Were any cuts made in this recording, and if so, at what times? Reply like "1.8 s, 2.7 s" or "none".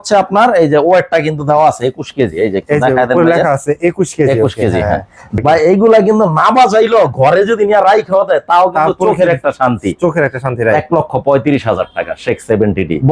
5.2 s

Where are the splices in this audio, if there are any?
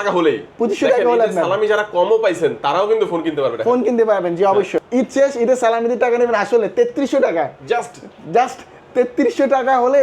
4.8 s

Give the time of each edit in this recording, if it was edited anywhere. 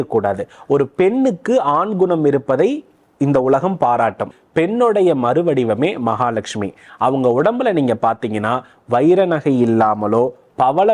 4.3 s

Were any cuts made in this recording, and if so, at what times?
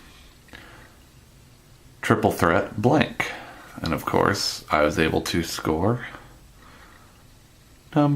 5.2 s

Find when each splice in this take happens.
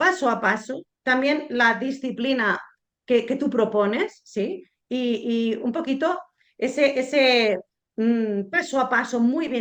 none

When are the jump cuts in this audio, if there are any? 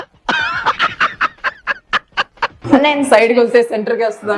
2.7 s

